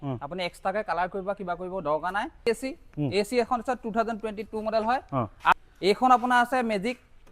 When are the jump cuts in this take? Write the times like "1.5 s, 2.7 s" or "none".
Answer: 2.5 s, 5.5 s

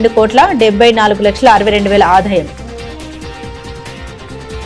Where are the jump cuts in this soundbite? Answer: none

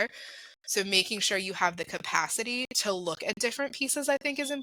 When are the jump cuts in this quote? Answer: none

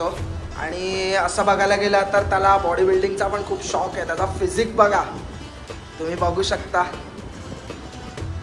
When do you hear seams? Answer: none

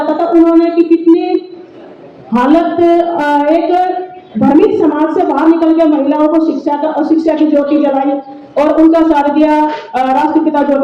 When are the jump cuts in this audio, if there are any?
none

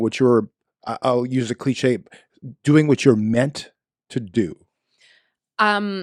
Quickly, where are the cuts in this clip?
none

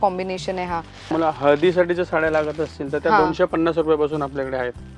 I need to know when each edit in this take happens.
1.0 s

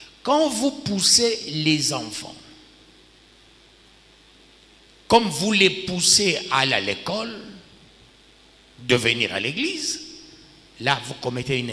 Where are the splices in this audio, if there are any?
none

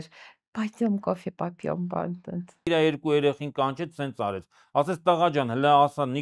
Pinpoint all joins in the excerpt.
2.6 s

